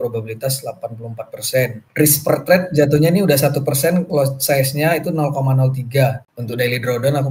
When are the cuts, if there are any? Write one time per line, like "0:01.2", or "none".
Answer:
0:01.8